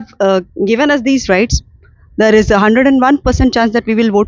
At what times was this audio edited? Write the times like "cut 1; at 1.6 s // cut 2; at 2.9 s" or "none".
none